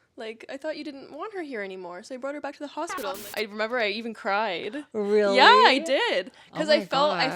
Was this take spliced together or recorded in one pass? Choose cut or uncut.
cut